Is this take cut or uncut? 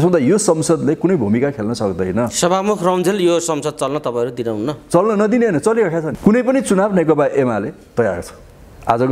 cut